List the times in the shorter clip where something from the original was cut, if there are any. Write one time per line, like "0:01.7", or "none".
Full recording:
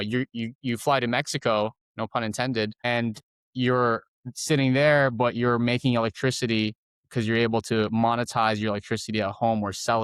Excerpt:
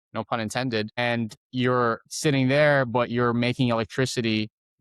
0:01.4
0:02.1